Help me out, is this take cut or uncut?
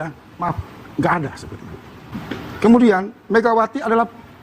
cut